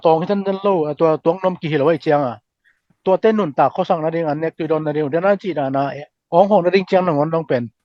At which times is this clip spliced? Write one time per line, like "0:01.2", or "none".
none